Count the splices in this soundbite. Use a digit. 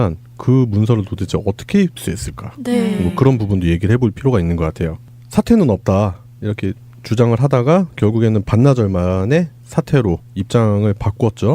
1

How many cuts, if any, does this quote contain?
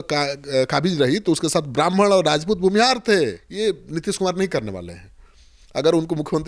1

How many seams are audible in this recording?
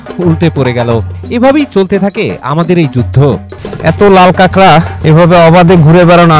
2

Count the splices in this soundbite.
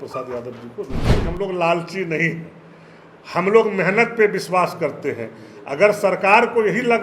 1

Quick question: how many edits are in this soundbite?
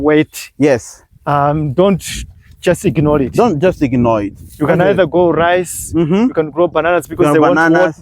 0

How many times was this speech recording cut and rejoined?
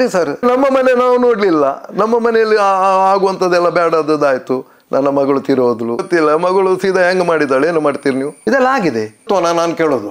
3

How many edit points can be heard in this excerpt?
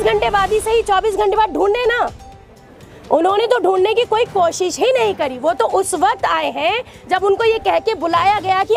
0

